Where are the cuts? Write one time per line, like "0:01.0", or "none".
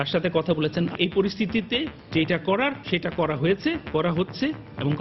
0:00.9
0:02.0
0:02.8